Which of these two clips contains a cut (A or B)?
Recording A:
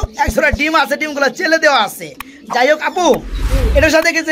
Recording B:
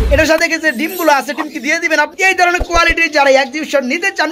B